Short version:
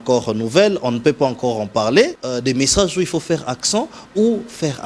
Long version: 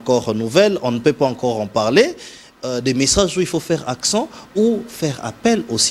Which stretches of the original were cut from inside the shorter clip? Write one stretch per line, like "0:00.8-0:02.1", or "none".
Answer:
0:02.2-0:02.6